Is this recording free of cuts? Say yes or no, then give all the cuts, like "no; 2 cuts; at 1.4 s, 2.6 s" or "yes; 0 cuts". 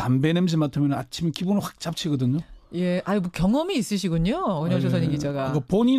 yes; 0 cuts